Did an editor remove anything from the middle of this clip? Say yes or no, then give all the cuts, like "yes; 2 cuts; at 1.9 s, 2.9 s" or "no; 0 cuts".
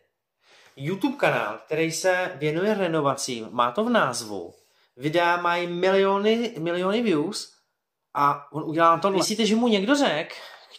yes; 1 cut; at 9.2 s